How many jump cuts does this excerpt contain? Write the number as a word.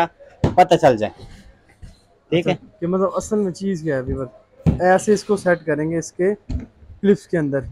zero